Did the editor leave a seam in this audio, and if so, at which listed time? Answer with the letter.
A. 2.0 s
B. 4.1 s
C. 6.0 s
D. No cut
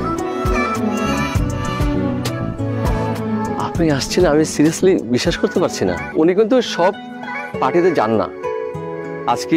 C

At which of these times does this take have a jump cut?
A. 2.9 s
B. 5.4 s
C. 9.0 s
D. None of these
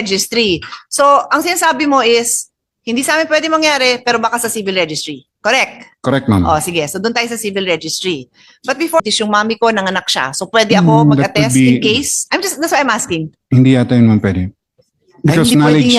C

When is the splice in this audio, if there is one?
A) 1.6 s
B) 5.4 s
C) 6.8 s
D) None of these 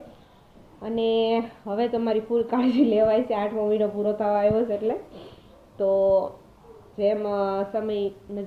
D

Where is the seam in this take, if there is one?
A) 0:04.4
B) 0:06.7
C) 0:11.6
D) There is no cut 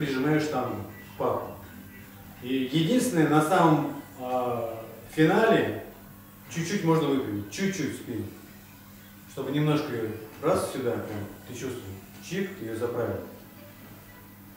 D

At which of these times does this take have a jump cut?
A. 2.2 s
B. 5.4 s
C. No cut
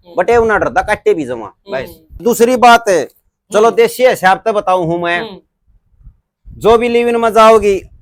A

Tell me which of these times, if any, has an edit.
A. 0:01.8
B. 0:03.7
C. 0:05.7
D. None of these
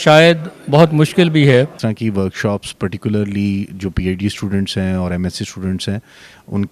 A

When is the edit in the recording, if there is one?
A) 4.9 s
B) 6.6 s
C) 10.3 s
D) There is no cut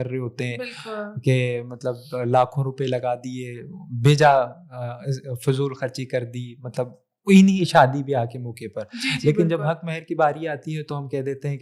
D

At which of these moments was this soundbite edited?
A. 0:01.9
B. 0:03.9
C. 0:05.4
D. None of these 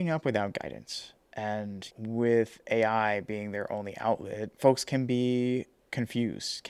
A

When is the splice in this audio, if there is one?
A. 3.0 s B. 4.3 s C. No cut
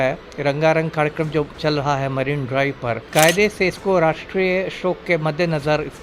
A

